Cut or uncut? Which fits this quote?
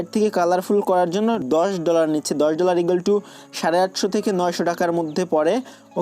cut